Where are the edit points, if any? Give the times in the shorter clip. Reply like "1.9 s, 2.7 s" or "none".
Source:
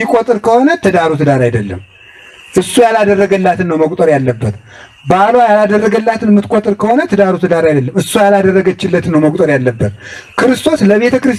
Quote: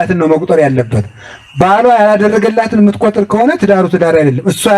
none

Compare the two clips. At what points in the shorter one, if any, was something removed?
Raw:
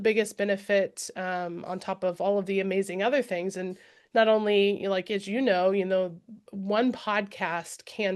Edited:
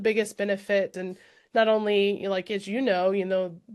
1.1 s

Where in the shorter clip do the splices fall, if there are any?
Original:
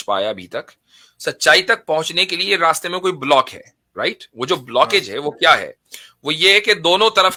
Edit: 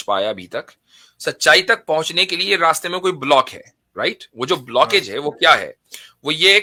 none

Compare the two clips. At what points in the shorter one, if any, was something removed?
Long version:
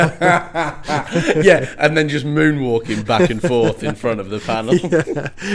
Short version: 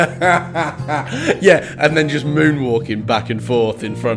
none

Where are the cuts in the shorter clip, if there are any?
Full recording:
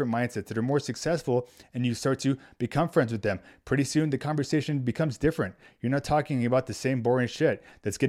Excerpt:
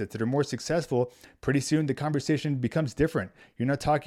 1.3 s

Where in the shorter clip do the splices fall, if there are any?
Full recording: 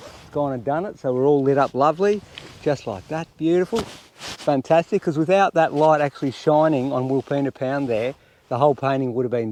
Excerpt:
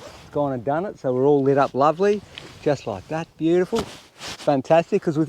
none

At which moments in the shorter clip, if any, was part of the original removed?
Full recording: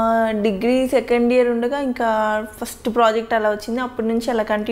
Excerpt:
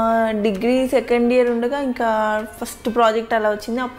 none

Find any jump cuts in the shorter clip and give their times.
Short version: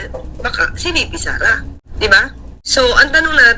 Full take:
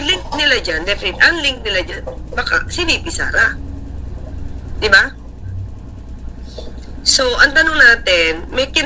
1.8 s, 2.5 s

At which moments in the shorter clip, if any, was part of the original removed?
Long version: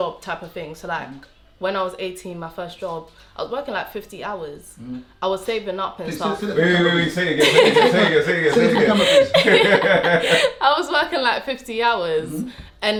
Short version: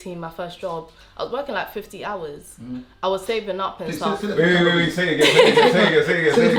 none

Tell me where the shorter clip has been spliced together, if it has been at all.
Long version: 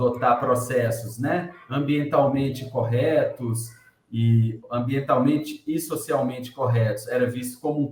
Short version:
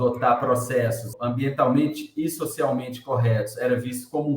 1.1 s

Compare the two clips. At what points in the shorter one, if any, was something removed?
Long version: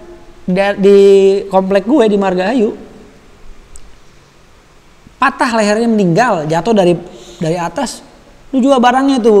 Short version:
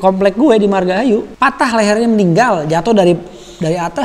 1.3 s

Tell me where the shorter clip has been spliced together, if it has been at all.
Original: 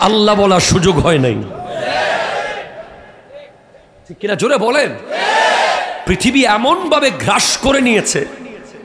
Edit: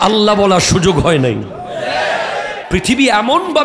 2.6 s

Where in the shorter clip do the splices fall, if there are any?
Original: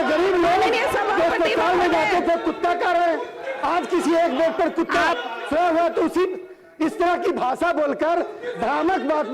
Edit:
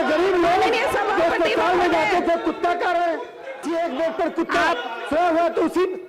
3.6 s

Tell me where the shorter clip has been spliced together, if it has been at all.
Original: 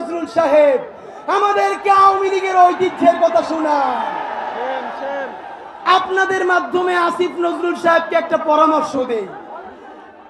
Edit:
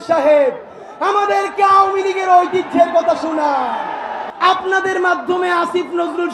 4.3 s

